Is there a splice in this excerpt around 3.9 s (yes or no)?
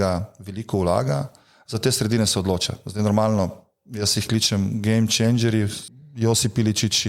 no